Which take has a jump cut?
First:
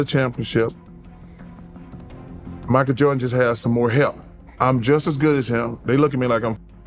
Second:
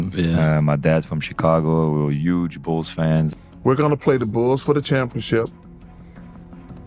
second; 1 cut; at 3.3 s

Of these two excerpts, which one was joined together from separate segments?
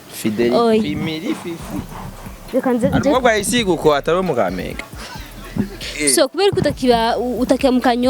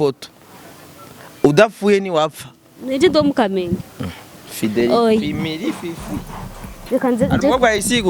first; 1 cut; at 5.8 s

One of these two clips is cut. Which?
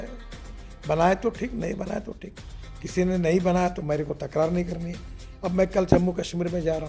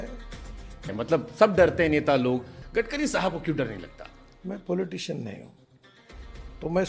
second; 2 cuts; at 0.9 s, 2.6 s

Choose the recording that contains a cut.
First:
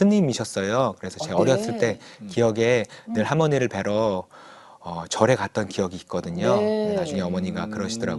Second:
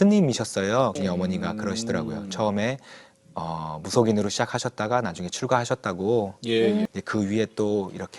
second; 2 cuts; at 1.0 s, 6.9 s

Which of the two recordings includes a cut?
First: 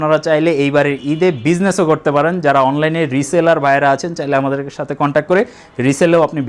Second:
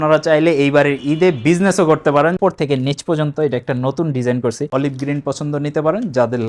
second; 2 cuts; at 2.4 s, 4.7 s

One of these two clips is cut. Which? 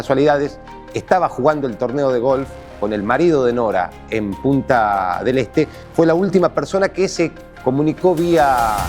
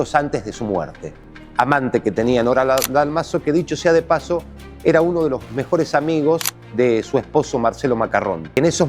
second; 1 cut; at 1.2 s

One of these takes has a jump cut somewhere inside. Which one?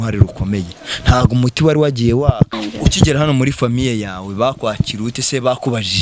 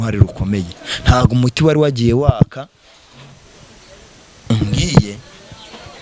first; 1 cut; at 2.5 s

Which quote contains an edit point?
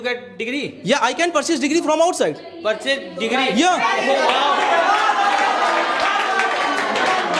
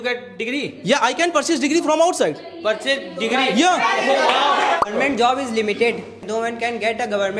second; 2 cuts; at 4.8 s, 6.2 s

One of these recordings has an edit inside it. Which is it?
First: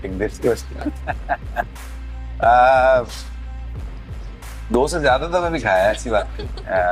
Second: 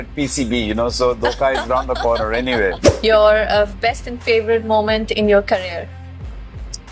second; 1 cut; at 2.9 s

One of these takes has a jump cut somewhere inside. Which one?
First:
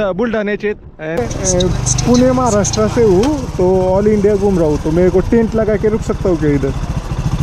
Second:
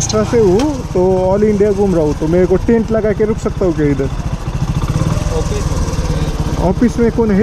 first; 1 cut; at 1.2 s

